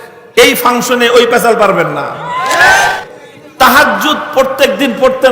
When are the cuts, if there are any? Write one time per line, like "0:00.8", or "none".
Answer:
0:02.9